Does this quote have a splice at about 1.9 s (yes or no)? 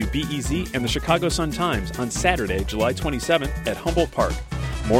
no